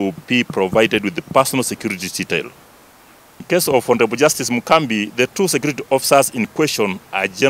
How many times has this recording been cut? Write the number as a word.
one